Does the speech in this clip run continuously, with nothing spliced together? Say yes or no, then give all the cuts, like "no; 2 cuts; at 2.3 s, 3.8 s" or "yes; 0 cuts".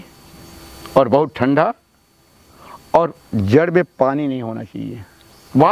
yes; 0 cuts